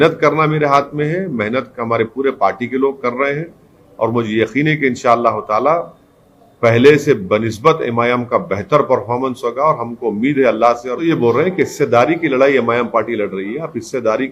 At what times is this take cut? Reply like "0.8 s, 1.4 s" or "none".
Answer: 11.0 s